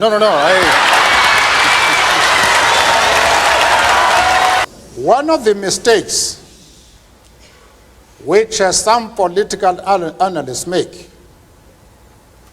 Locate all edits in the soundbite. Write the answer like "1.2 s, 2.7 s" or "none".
4.6 s

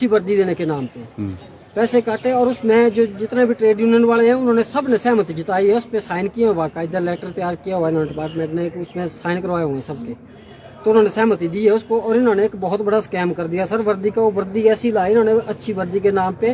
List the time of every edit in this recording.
none

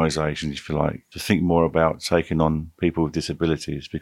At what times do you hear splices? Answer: 1.1 s

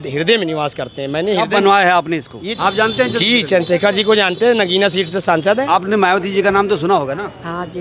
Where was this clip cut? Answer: 2.4 s, 5.7 s

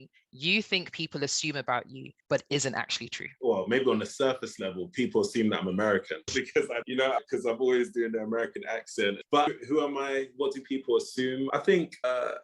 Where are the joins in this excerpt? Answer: 6.8 s, 9.2 s, 11.5 s

